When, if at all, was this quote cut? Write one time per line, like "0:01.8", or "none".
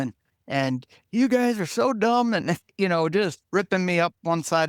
0:03.4

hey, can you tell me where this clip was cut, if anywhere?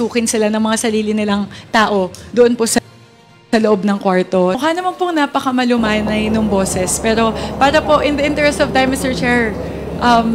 none

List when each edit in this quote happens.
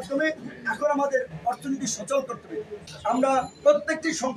0:02.8

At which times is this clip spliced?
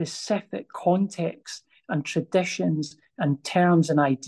none

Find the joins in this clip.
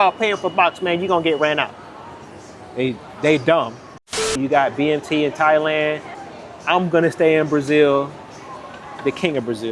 0:04.4
0:06.1

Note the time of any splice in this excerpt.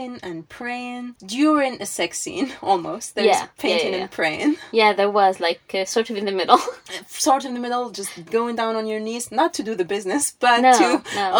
0:01.2

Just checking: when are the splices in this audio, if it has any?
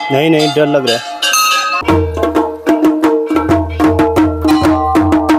0:01.8

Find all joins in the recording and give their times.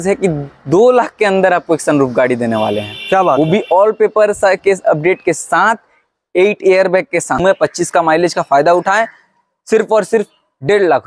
0:07.3

